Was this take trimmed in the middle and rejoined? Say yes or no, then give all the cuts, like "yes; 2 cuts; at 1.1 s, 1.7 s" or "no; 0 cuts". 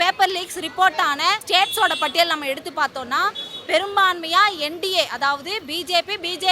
yes; 1 cut; at 1.4 s